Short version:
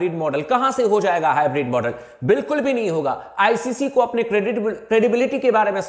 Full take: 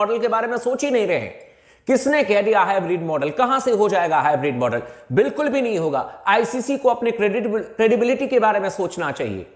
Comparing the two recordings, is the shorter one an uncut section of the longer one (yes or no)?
yes